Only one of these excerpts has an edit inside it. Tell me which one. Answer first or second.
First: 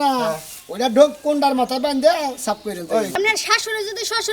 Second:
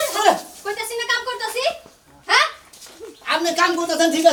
first